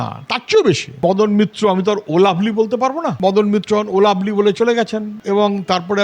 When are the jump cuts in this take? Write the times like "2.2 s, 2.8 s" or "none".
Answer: 1.0 s, 3.1 s